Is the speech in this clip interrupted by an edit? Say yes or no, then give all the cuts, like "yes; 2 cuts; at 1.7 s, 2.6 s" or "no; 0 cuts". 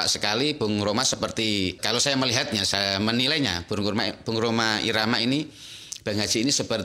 no; 0 cuts